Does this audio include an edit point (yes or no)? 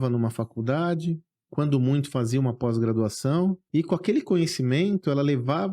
yes